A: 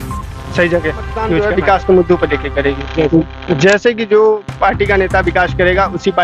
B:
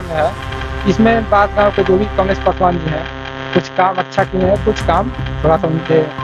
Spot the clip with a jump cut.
A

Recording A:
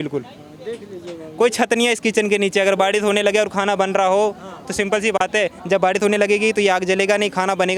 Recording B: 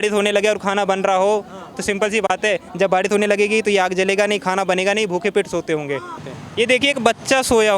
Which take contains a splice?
B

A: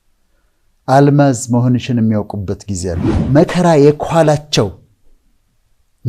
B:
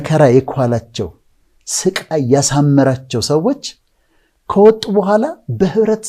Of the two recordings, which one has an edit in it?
A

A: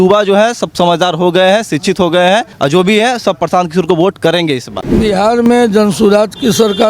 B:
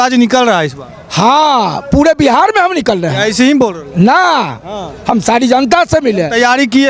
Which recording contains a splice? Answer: A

